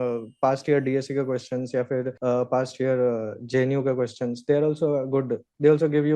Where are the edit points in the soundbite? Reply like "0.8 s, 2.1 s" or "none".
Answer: none